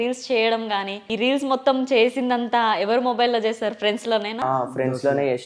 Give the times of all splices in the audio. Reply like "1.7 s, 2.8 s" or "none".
1.1 s